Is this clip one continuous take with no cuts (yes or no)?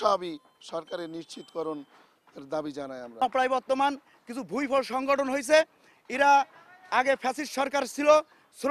no